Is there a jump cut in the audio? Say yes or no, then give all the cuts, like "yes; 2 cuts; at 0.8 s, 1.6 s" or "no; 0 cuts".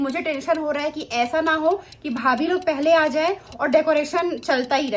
no; 0 cuts